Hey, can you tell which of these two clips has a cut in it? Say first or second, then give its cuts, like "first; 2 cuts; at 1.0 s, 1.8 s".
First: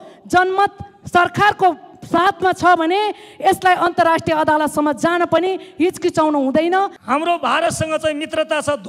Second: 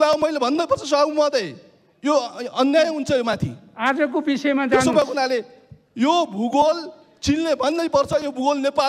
first; 1 cut; at 7.0 s